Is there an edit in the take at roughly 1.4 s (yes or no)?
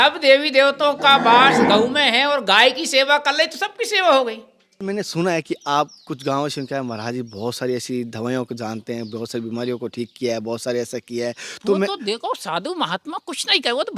no